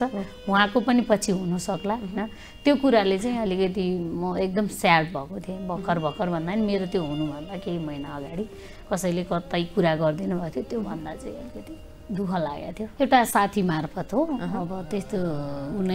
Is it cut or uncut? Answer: cut